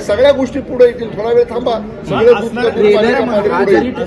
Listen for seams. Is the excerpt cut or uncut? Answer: uncut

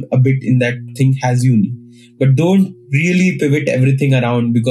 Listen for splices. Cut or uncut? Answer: uncut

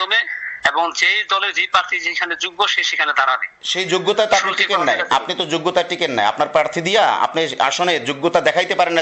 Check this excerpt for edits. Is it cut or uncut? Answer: uncut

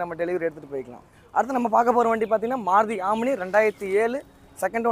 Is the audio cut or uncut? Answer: uncut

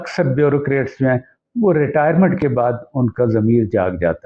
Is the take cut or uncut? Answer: uncut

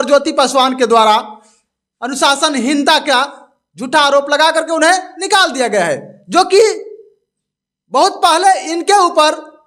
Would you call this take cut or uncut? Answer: uncut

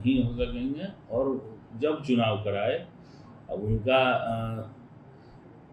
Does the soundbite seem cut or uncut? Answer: uncut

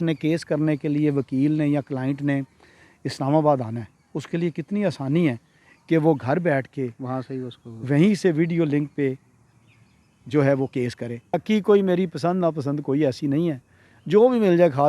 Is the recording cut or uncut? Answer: cut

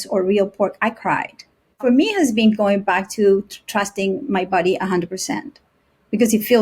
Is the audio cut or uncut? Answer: cut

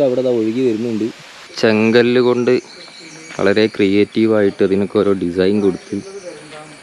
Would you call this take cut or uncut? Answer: cut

